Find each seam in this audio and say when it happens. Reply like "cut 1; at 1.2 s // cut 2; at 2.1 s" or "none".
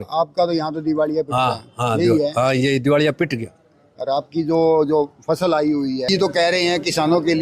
cut 1; at 6.1 s